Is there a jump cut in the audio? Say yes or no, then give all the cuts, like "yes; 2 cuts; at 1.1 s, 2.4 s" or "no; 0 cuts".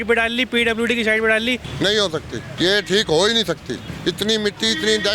yes; 3 cuts; at 1.7 s, 2.5 s, 3.9 s